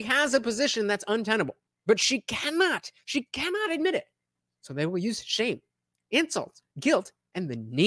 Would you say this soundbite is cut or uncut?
cut